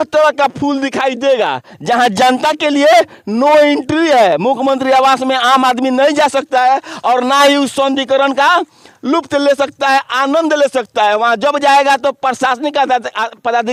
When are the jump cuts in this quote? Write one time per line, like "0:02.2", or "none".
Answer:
none